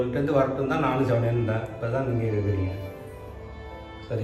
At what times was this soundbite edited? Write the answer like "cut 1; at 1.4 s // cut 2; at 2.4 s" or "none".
none